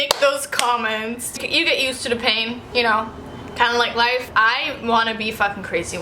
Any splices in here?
yes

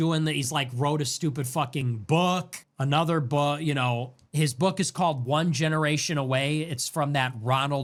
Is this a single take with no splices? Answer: yes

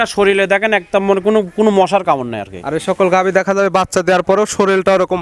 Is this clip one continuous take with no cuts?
yes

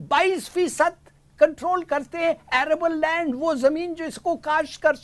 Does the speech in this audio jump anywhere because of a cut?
no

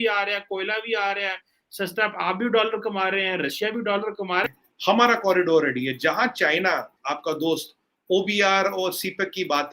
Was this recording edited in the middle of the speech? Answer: yes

